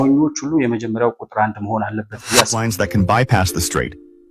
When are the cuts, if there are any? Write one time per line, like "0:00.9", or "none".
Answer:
0:02.6